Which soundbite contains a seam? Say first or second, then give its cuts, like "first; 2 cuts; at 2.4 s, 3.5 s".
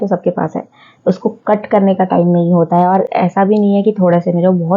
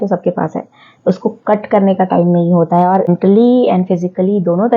second; 1 cut; at 3.1 s